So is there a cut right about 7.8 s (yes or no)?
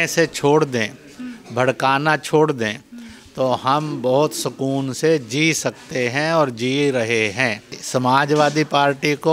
yes